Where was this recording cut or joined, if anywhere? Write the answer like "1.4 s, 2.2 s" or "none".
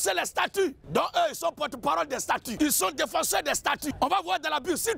0.8 s, 2.5 s, 3.9 s